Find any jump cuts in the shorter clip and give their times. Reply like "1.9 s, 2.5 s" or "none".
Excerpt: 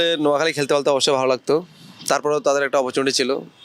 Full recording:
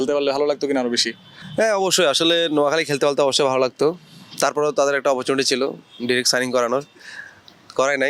none